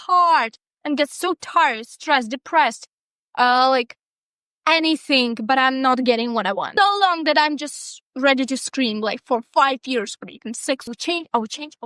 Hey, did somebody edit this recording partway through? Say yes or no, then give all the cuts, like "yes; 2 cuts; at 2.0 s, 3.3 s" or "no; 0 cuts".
yes; 2 cuts; at 6.7 s, 10.9 s